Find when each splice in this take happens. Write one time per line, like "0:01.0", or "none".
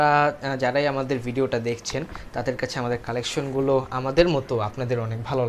none